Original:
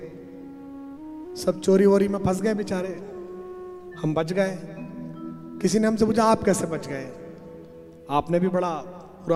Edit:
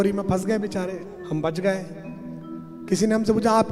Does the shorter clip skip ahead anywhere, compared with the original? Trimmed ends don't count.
yes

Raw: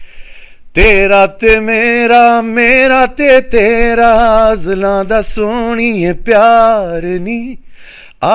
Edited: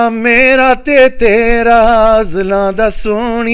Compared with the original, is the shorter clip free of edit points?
yes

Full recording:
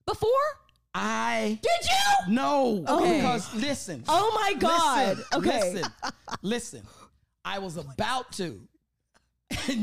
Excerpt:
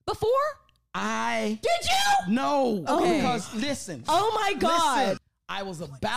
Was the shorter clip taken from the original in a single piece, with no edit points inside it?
no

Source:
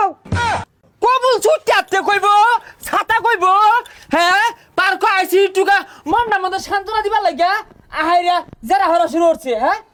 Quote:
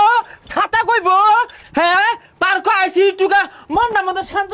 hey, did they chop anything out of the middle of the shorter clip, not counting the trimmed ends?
no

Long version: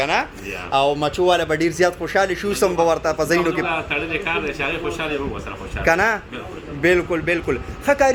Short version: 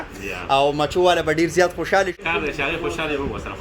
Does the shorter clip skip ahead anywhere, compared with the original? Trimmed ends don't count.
yes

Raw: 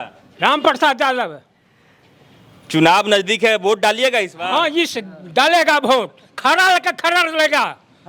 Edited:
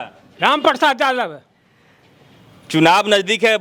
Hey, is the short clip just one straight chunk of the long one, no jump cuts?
yes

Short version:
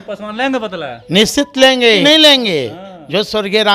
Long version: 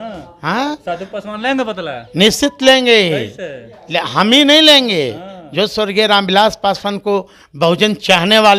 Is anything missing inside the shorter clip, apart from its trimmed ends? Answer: yes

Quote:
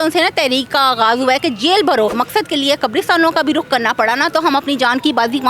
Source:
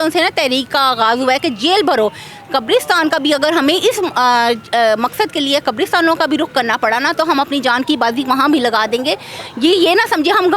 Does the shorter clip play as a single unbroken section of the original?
no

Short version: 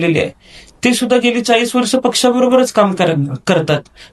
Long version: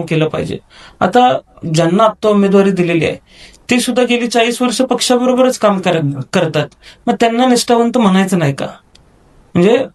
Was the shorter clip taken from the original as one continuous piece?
yes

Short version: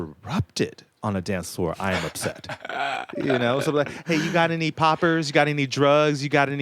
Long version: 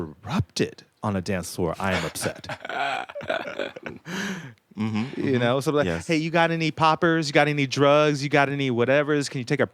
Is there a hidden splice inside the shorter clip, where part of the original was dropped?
yes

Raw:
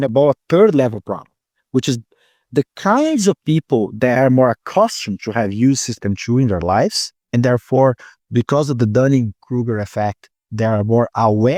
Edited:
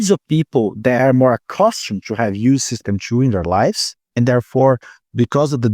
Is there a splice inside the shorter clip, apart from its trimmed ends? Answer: no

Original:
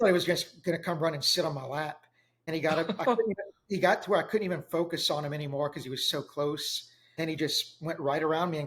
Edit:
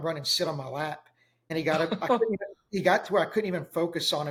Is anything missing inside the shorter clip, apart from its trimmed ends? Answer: no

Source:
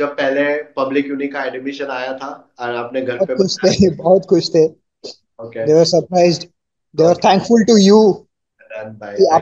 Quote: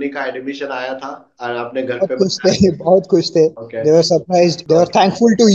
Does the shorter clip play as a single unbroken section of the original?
no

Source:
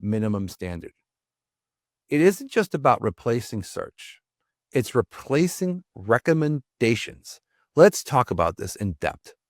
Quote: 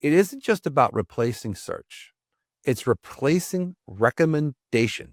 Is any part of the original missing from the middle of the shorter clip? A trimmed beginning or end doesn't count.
no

